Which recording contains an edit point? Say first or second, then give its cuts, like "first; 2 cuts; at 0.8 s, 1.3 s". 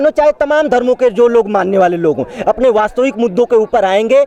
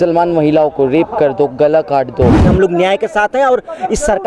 second; 1 cut; at 2.4 s